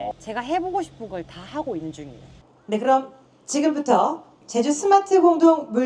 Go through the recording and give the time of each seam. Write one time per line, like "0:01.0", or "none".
0:02.4